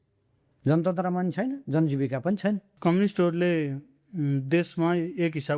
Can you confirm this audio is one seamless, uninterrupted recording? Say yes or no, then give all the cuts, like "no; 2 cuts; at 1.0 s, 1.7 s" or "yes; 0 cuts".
no; 1 cut; at 2.7 s